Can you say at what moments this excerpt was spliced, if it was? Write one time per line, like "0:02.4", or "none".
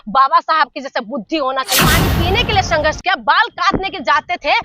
0:01.8

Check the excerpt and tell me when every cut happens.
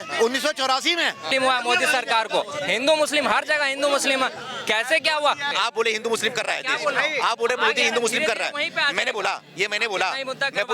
0:01.3
0:05.5

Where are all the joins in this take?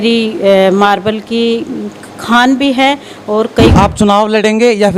0:03.7

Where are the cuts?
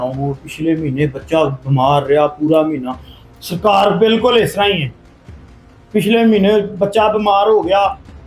none

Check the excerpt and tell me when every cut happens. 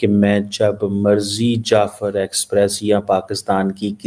none

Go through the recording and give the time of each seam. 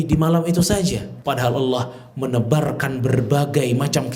0:01.1

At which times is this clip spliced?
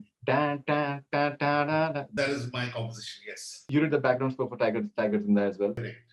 0:02.1
0:03.5

